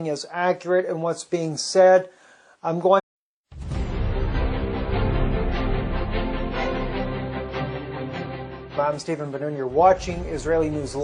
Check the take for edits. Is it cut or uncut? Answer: uncut